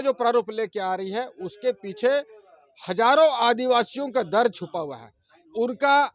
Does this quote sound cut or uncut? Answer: uncut